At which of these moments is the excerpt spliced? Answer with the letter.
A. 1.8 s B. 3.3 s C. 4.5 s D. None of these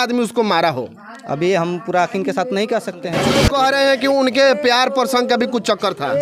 B